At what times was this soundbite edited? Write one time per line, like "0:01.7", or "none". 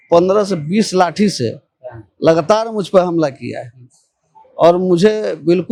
none